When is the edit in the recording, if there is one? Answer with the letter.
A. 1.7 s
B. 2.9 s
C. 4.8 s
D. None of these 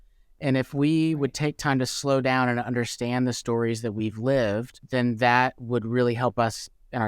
C